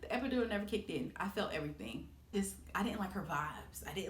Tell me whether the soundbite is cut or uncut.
cut